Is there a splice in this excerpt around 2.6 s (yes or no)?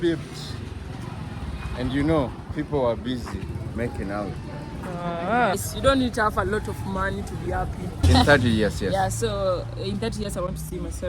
no